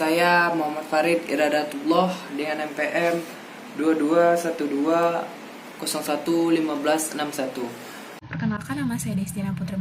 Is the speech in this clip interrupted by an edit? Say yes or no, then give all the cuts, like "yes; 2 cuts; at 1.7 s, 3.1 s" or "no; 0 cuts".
yes; 1 cut; at 8.2 s